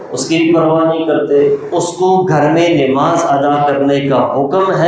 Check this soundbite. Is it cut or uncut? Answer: cut